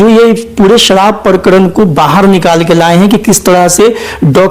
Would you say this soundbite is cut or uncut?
uncut